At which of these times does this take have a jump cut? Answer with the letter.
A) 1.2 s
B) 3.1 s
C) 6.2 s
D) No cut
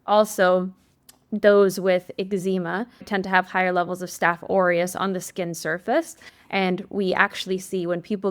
B